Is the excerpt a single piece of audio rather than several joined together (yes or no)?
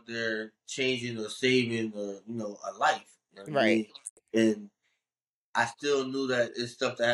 yes